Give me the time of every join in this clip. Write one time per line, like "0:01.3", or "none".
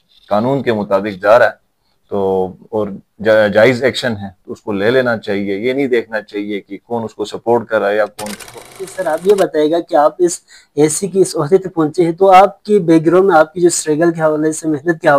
0:08.9